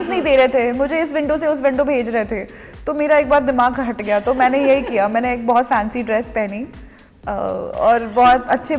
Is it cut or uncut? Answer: uncut